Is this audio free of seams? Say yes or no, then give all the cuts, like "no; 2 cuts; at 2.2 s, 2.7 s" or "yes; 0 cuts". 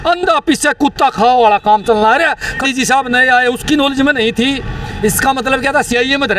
no; 1 cut; at 2.6 s